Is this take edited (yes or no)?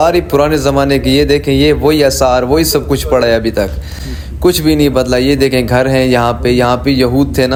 no